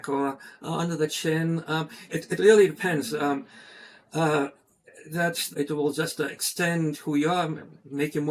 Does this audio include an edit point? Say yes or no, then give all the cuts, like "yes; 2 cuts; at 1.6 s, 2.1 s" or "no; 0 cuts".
yes; 1 cut; at 5.5 s